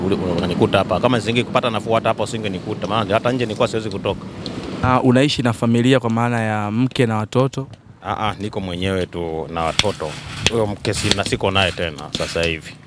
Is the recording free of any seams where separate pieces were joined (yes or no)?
no